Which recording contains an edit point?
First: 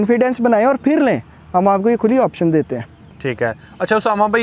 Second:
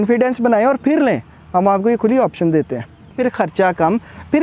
second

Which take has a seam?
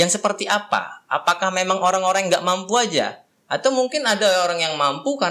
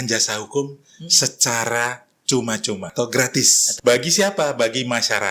second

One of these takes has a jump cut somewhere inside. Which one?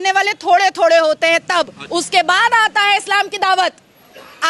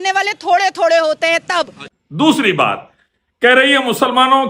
first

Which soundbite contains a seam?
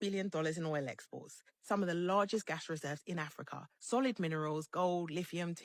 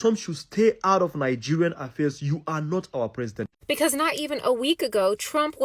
second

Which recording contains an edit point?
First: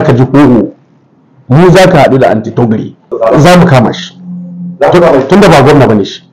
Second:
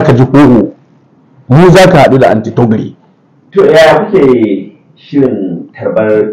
first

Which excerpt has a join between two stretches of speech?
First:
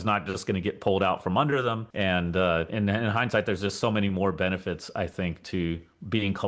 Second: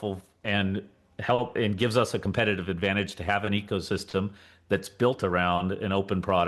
first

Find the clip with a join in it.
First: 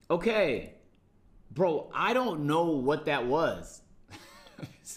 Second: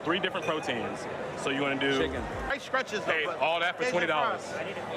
second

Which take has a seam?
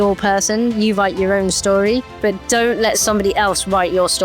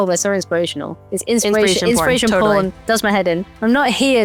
first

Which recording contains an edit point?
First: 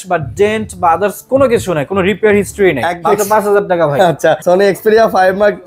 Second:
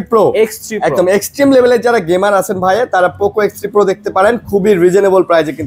first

